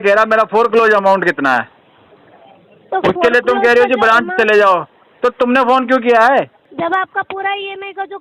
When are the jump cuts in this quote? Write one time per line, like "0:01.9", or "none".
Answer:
0:06.6